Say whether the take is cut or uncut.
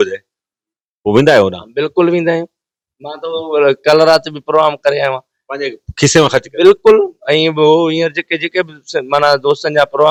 uncut